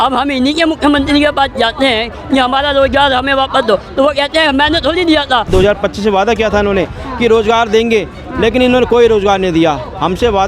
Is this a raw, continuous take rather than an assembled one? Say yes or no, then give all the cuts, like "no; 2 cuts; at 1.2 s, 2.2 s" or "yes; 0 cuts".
no; 1 cut; at 5.5 s